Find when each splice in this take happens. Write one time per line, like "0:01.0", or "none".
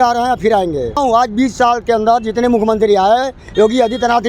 0:01.0

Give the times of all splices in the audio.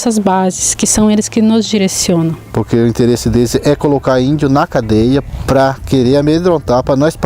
0:02.5

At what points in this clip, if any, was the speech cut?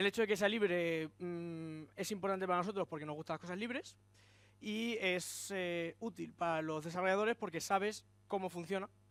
none

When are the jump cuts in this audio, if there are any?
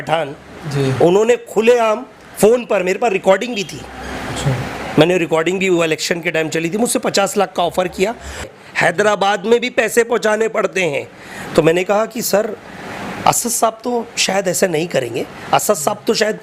0:08.5

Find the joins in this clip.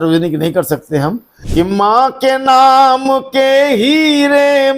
0:01.3

